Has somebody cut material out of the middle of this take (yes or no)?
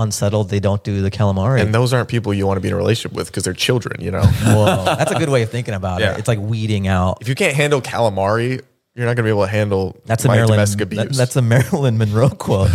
no